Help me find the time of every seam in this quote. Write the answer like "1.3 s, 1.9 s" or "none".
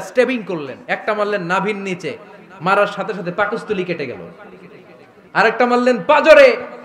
none